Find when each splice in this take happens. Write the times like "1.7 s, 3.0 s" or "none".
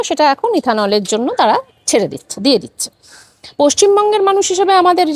none